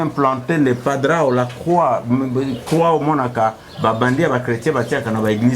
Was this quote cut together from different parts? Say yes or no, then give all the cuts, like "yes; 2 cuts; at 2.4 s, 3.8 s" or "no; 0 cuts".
no; 0 cuts